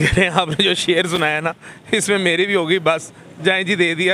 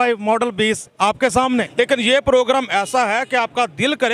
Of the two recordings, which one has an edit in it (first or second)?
second